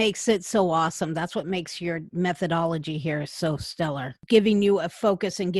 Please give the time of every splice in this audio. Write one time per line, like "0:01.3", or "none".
0:02.1
0:04.2